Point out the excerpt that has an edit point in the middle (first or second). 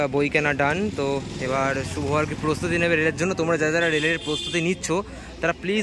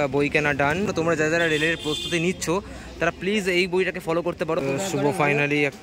second